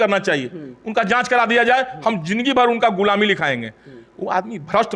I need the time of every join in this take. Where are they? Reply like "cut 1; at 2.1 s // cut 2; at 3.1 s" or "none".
none